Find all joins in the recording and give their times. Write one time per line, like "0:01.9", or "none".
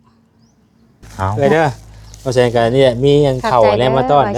0:01.3